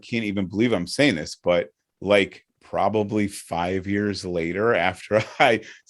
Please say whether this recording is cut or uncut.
uncut